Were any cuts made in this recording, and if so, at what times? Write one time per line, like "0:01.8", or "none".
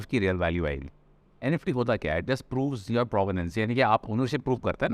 none